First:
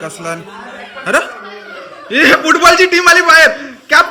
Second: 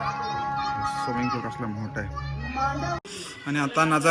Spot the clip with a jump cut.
second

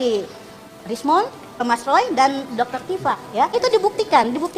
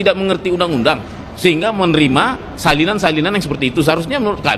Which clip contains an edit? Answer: first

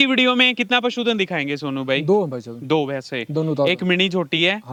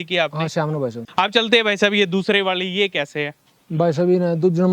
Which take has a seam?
second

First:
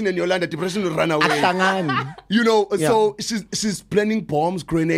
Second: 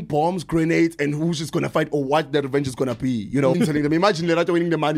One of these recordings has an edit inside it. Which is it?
second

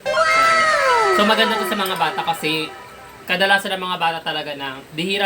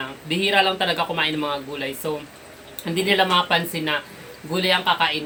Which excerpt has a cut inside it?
first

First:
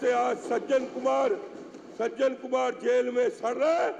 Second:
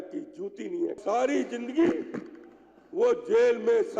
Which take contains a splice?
second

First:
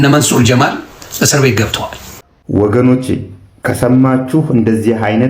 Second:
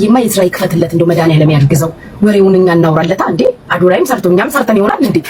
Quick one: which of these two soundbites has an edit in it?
first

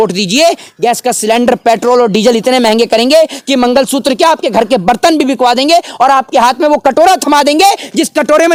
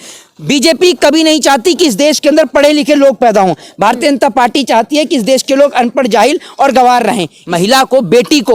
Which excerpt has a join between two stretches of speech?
second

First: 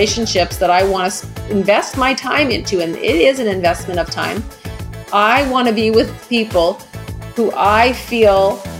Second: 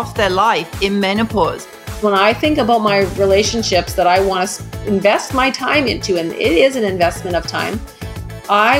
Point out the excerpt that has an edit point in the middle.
second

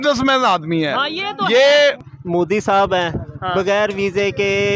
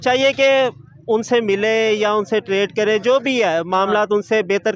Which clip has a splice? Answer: first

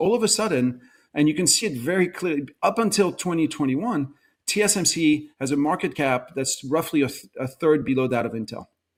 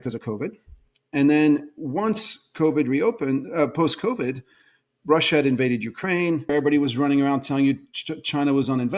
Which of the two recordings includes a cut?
second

